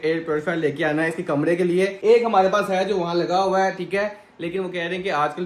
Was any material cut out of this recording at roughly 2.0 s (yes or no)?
no